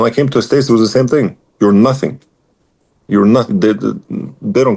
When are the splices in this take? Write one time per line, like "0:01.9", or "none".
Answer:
none